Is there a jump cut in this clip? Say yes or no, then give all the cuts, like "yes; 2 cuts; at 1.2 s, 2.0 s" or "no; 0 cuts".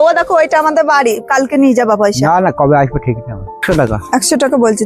yes; 1 cut; at 3.6 s